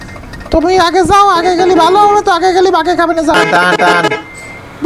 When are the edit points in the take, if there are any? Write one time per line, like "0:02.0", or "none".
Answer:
0:03.3